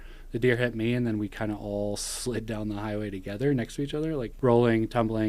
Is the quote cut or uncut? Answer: cut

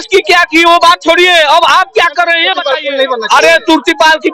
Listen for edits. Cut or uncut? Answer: cut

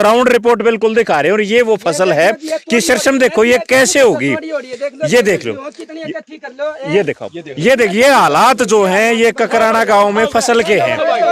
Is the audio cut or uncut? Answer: uncut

